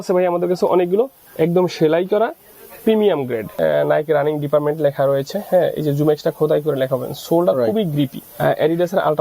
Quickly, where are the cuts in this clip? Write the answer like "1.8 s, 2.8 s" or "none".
3.5 s, 8.2 s